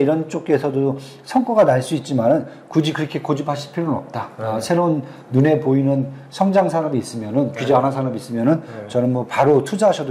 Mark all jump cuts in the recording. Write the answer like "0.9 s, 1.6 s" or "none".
none